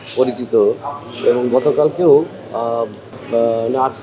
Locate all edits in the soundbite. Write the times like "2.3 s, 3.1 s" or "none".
none